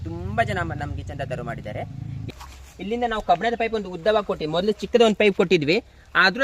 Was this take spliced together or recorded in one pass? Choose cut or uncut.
uncut